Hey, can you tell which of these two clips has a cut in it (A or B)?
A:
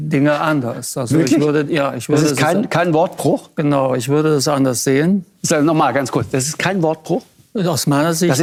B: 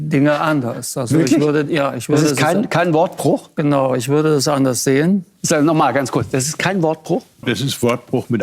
B